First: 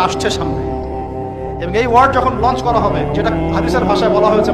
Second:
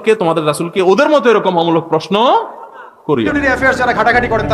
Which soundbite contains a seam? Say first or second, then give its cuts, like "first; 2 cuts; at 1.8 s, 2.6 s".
second; 1 cut; at 3.3 s